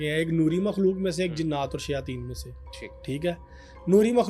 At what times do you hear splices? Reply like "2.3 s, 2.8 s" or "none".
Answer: none